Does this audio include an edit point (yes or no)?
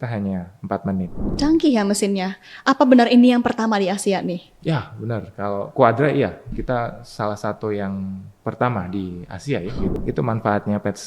yes